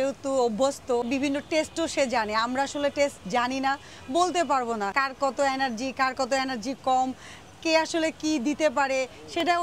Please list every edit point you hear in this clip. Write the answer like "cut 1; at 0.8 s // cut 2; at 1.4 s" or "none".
cut 1; at 1.1 s // cut 2; at 4.9 s